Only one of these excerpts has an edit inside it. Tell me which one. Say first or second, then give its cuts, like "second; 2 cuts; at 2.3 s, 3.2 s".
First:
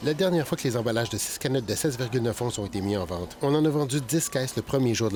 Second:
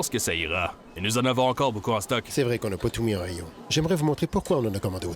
second; 1 cut; at 2.3 s